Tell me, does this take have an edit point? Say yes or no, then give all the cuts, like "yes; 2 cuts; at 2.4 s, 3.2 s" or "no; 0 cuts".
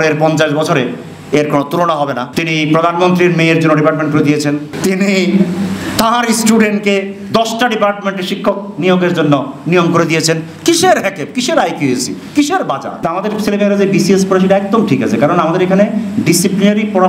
yes; 3 cuts; at 2.3 s, 4.7 s, 13.1 s